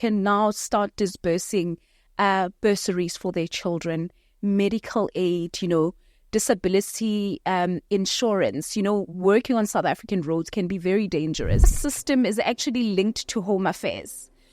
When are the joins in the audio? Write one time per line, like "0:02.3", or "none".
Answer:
0:11.8